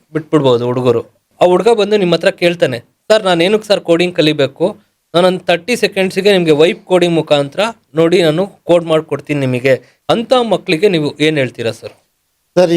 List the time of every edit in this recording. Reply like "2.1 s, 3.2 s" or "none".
1.3 s, 9.9 s

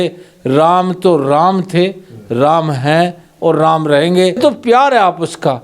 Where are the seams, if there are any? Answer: 4.4 s

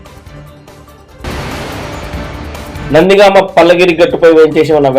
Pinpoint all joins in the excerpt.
1.2 s, 2.8 s

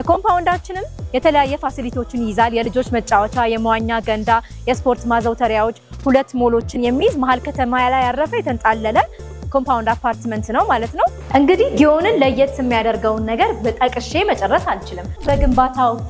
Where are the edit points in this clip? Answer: 11.2 s, 15.2 s

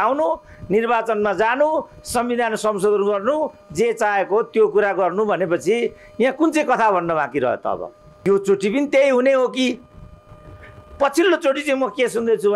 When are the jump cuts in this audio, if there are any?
8.1 s

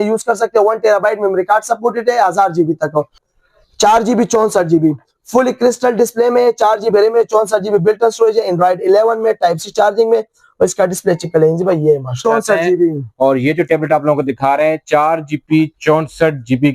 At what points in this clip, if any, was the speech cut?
3.2 s, 12.2 s

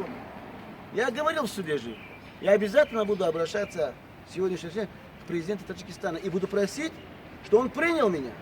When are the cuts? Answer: none

